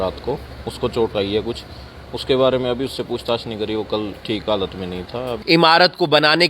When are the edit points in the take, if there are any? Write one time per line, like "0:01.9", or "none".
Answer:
0:05.4